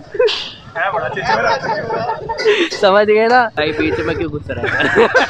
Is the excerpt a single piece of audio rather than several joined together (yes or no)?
no